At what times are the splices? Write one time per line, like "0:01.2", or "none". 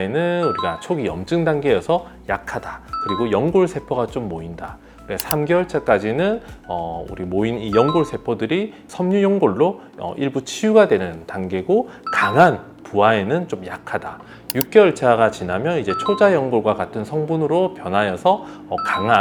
none